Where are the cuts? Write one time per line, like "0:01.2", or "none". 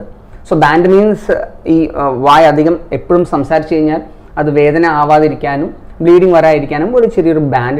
none

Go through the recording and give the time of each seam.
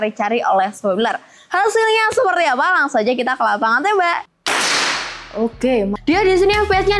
0:04.3
0:05.9

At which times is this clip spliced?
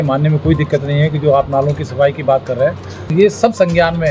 0:03.0

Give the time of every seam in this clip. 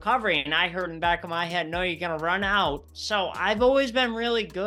none

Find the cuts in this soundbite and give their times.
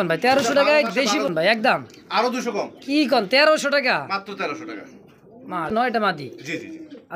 0:01.3
0:05.7

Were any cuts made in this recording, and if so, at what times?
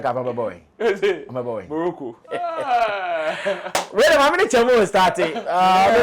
0:02.3

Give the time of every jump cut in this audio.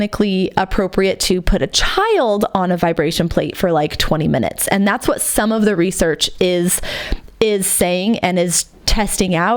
none

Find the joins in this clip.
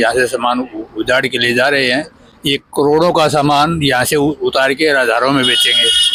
none

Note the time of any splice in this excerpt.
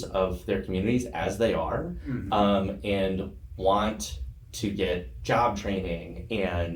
none

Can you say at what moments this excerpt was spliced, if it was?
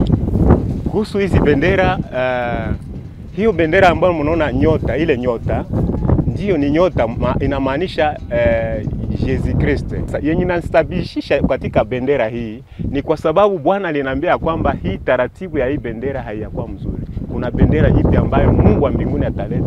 0:10.1

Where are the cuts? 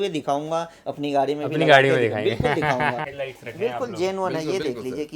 0:03.1

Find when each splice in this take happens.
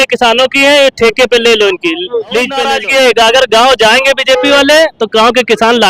0:02.6

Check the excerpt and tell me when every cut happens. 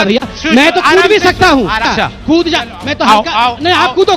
0:01.9

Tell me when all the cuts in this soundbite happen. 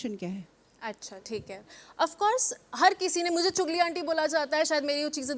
0:01.7

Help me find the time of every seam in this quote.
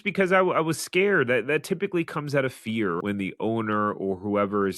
0:03.0

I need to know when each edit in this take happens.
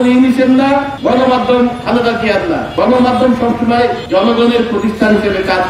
0:00.9
0:02.7
0:04.0

